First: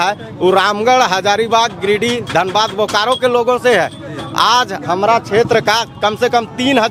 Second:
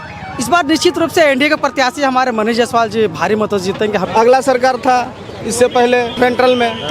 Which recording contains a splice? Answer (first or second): second